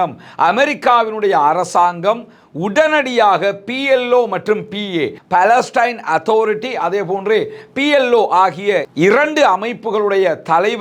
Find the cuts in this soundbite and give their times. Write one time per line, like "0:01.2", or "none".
none